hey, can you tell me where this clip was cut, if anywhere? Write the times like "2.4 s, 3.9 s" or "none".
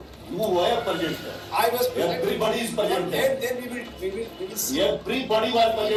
none